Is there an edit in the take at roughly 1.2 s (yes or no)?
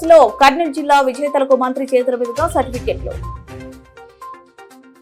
no